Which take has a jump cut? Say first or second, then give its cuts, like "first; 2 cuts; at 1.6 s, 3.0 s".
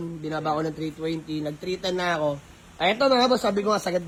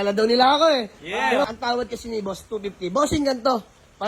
second; 1 cut; at 1.4 s